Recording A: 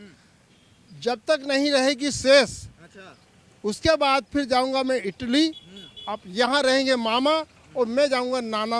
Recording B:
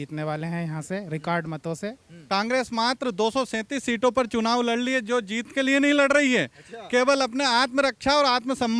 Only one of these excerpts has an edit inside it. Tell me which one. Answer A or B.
B